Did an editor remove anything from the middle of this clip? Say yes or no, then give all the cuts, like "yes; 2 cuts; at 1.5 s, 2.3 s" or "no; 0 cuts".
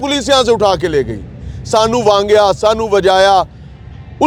no; 0 cuts